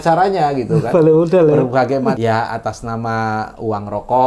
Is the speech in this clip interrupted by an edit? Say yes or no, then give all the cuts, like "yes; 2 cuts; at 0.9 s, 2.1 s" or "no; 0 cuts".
yes; 1 cut; at 2.2 s